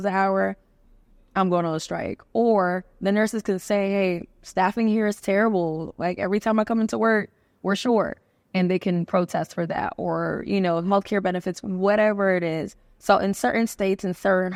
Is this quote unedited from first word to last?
yes; 0 cuts

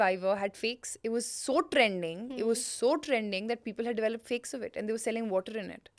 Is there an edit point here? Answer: no; 0 cuts

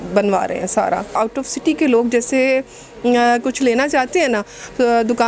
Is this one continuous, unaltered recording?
no; 1 cut; at 1.1 s

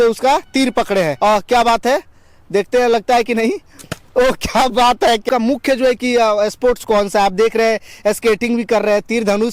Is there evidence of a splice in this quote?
yes; 2 cuts; at 1.1 s, 5.2 s

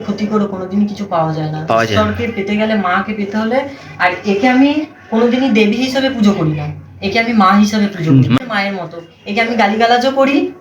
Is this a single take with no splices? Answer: no; 1 cut; at 8.4 s

